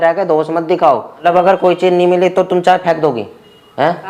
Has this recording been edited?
yes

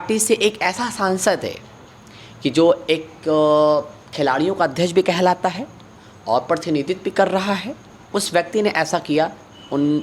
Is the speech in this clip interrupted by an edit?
no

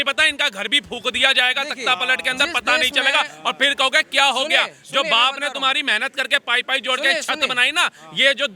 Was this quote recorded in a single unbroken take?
yes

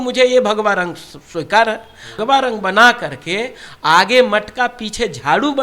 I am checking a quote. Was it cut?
yes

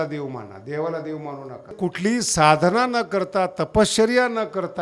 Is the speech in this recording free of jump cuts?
no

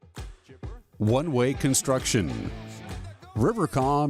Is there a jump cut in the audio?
yes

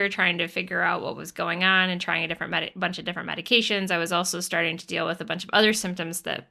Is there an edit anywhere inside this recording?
no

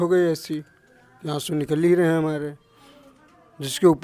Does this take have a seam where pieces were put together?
no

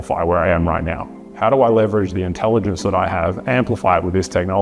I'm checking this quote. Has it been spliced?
no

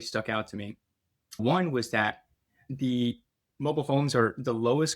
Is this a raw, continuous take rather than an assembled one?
no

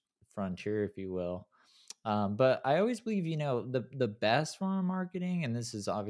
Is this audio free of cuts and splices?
yes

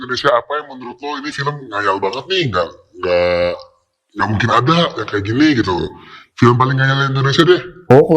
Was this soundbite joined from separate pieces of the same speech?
no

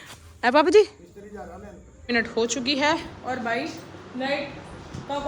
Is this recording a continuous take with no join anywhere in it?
no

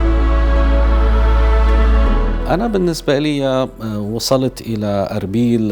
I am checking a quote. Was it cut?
no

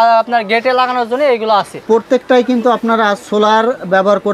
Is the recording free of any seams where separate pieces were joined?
no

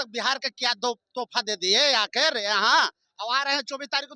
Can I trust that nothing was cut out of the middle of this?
yes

